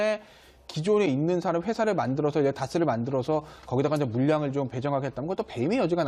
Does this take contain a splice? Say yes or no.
no